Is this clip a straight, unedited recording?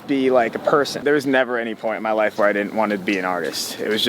no; 1 cut; at 1.0 s

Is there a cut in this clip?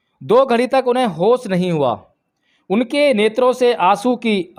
no; 0 cuts

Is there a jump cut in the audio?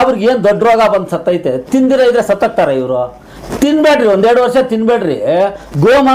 no; 0 cuts

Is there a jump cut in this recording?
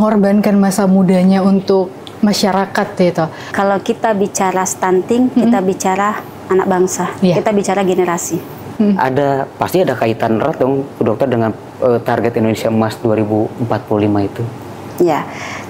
yes; 2 cuts; at 3.4 s, 8.7 s

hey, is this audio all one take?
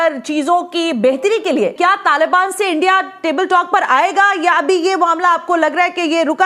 no; 1 cut; at 1.7 s

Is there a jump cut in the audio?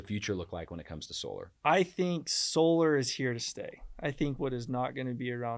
yes; 1 cut; at 1.5 s

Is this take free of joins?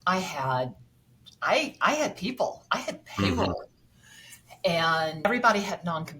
yes; 0 cuts

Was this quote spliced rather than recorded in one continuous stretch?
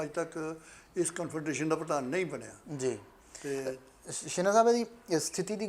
no; 0 cuts

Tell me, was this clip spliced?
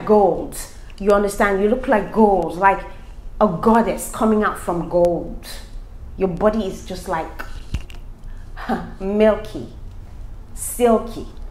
no; 0 cuts

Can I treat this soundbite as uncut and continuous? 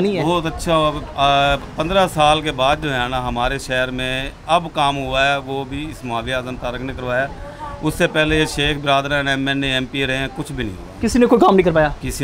yes; 0 cuts

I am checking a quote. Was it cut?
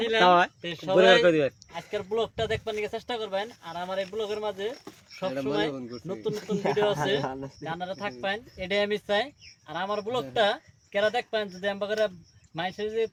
no; 0 cuts

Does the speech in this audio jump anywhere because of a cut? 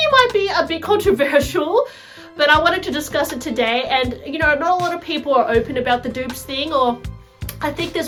no; 0 cuts

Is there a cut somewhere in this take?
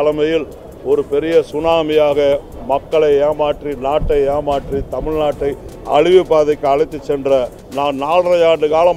yes; 1 cut; at 7.6 s

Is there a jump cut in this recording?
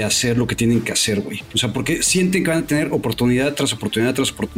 no; 0 cuts

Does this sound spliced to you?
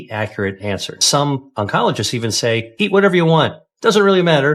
yes; 2 cuts; at 1.1 s, 2.7 s

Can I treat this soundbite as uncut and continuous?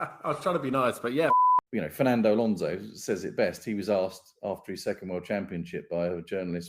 no; 1 cut; at 1.3 s

